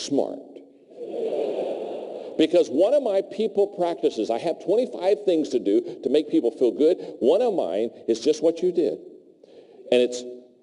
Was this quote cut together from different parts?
no; 0 cuts

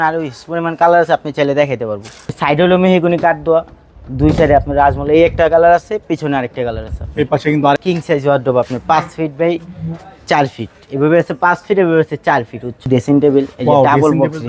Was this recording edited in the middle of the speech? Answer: yes; 3 cuts; at 2.4 s, 7.8 s, 12.9 s

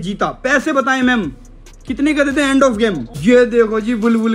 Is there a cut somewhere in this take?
yes; 1 cut; at 3.1 s

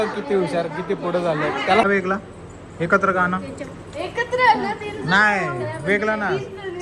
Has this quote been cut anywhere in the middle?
yes; 1 cut; at 1.8 s

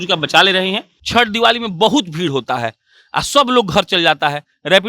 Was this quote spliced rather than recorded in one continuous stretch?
yes; 1 cut; at 0.9 s

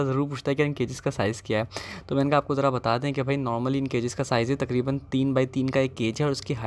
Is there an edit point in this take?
no; 0 cuts

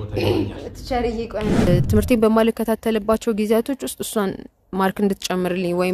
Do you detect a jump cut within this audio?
yes; 1 cut; at 1.7 s

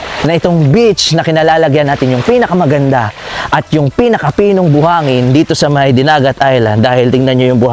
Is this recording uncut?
yes; 0 cuts

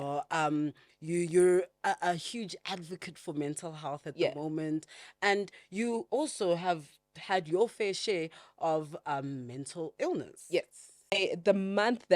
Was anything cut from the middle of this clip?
yes; 1 cut; at 11.2 s

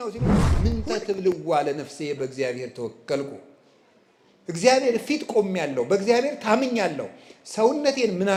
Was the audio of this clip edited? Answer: no; 0 cuts

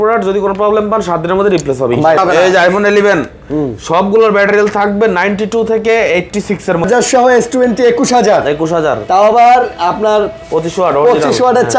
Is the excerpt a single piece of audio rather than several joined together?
no; 2 cuts; at 2.2 s, 6.8 s

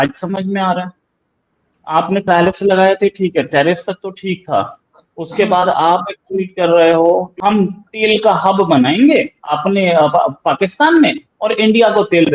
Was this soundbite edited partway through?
yes; 1 cut; at 7.3 s

